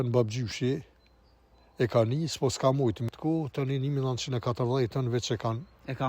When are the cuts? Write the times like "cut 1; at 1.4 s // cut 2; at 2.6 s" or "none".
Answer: cut 1; at 3.1 s